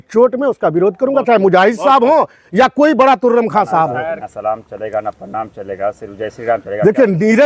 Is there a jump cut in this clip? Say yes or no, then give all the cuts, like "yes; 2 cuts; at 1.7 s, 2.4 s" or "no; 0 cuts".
yes; 1 cut; at 4.2 s